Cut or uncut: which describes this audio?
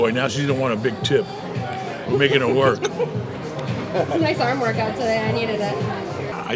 uncut